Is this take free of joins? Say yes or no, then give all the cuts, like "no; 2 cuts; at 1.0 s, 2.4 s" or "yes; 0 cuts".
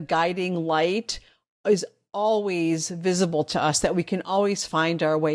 yes; 0 cuts